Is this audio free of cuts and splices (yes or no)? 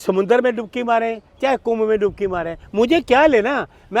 yes